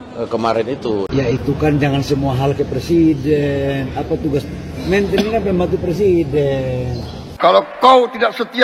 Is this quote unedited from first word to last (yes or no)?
no